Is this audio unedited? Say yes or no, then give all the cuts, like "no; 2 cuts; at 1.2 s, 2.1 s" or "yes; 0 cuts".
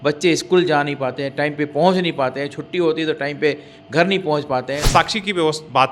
no; 1 cut; at 4.8 s